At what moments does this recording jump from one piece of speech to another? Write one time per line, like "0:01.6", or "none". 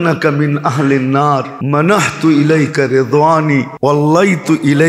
0:01.5
0:03.7

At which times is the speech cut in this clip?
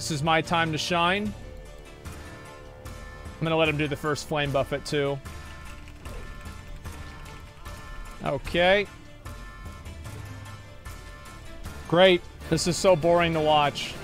none

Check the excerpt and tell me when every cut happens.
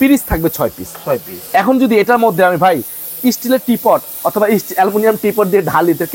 none

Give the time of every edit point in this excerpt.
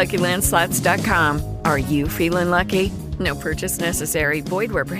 none

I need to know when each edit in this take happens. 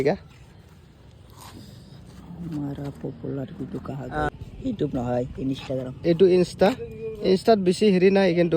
0:04.3

